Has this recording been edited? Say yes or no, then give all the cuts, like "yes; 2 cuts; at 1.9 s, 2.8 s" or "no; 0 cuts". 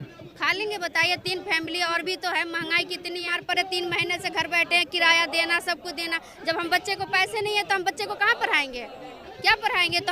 yes; 1 cut; at 3.3 s